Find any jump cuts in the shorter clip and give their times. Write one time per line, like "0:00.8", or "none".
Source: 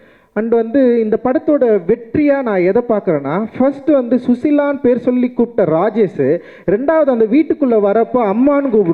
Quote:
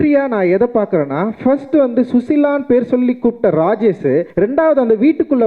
0:04.3